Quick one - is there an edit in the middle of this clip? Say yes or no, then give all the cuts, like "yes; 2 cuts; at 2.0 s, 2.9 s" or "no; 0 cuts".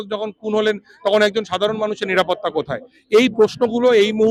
no; 0 cuts